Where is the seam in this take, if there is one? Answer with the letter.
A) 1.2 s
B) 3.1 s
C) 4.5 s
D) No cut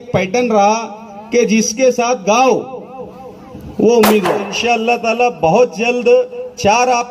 C